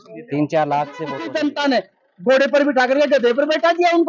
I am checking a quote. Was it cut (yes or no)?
yes